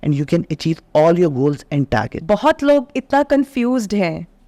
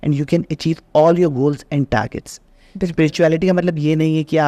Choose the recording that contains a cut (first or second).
first